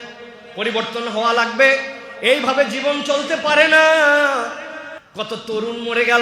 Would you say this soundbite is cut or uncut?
uncut